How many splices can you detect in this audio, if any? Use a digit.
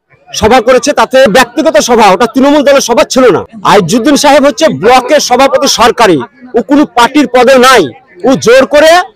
2